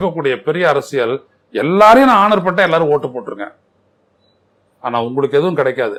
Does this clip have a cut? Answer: no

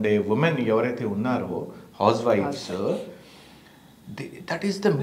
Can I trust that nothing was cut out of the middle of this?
yes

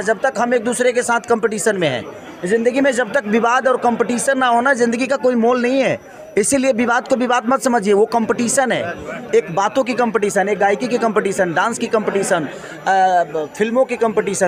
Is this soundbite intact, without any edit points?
yes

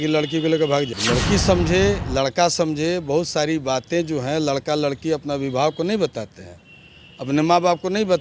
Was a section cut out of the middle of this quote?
yes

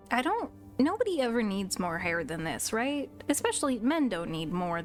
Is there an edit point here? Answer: no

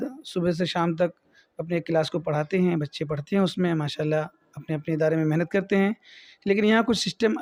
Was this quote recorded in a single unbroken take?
yes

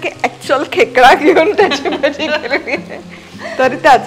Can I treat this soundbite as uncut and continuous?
yes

